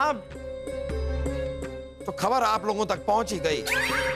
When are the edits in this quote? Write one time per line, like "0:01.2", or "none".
0:01.9